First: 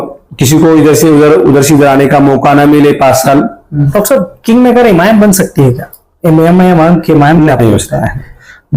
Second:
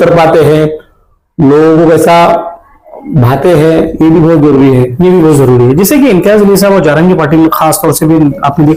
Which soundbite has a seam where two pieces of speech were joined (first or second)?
first